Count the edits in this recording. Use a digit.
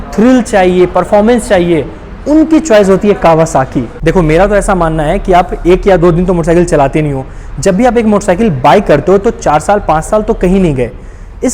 1